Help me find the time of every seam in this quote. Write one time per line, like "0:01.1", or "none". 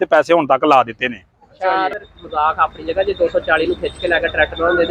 0:02.0